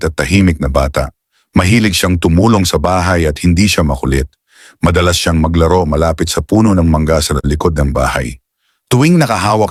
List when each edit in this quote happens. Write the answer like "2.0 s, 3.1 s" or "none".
none